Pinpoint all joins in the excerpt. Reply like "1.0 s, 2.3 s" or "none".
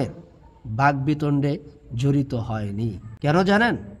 3.0 s